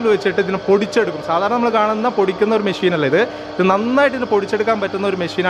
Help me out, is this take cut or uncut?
uncut